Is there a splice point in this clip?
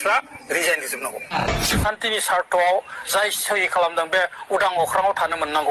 yes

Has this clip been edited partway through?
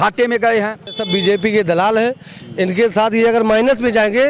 yes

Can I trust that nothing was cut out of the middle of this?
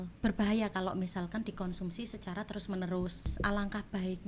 no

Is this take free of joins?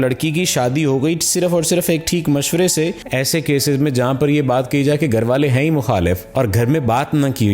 no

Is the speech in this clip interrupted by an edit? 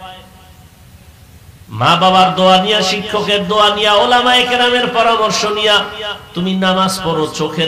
no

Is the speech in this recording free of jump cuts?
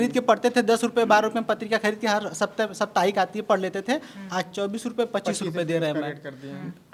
yes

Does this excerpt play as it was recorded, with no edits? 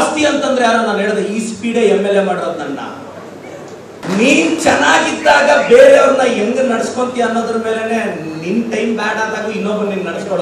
no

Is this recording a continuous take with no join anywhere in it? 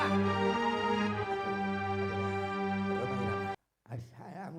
no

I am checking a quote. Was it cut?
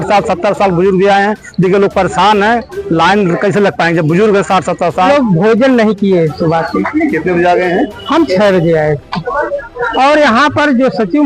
yes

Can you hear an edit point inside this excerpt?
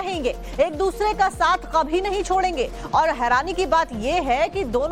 yes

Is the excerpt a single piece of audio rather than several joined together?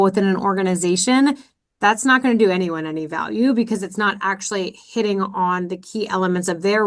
yes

